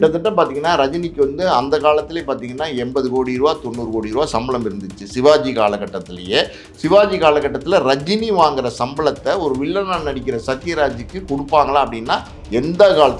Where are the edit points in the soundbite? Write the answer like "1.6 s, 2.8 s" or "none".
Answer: none